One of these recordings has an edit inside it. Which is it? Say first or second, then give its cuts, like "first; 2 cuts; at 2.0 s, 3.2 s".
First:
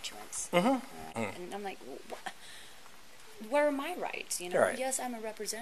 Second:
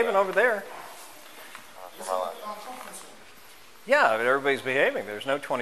first; 1 cut; at 1.2 s